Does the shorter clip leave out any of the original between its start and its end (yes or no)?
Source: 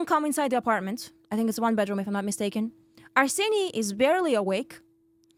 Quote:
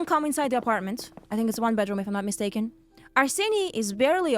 no